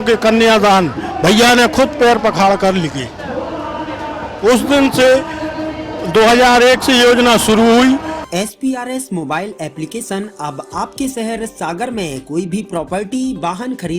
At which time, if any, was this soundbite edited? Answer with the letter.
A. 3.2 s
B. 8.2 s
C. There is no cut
B